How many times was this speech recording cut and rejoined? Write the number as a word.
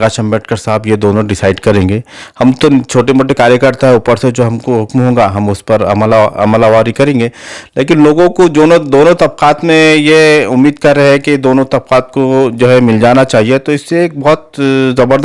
zero